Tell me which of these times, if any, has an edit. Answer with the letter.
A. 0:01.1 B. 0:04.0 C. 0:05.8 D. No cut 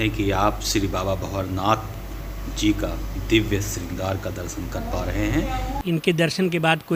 C